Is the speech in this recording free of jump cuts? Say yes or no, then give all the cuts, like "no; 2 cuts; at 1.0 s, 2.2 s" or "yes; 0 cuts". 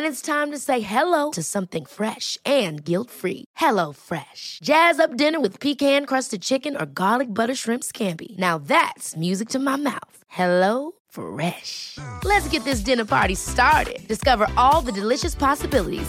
yes; 0 cuts